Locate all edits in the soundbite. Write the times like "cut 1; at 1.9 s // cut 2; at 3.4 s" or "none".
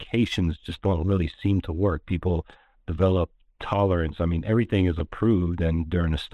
none